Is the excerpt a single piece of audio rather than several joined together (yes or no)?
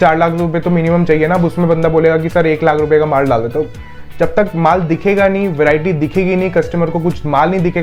yes